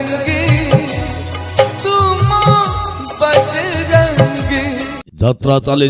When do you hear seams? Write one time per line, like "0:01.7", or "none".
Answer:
0:04.9